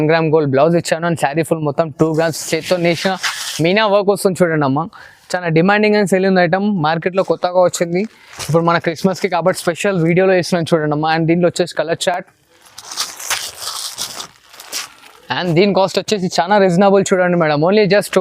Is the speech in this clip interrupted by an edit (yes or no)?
no